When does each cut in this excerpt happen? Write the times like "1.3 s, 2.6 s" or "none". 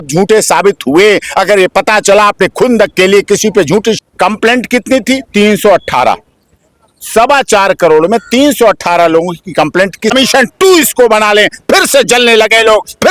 4.0 s, 10.1 s

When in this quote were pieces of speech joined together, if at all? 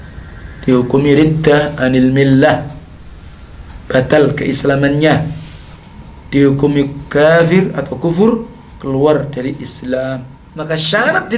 10.4 s

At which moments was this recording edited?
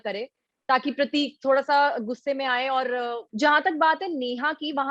3.2 s

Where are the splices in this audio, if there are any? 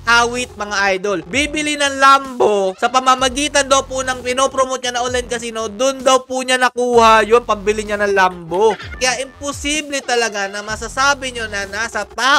8.9 s

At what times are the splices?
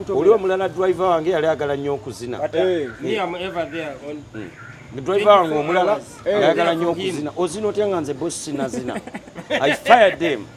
none

